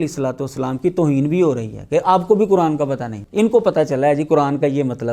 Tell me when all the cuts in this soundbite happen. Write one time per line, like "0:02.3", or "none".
0:03.1